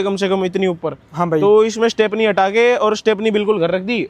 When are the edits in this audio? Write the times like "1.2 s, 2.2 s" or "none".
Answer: none

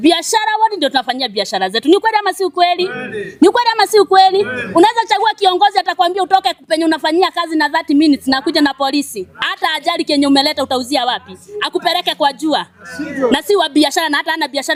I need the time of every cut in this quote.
none

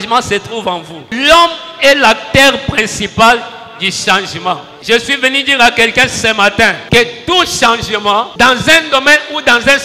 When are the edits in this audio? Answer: 1.1 s, 4.7 s, 6.8 s, 8.3 s

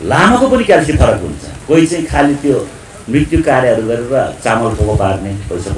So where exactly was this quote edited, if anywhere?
none

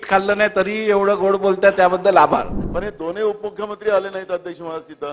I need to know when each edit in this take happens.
2.6 s

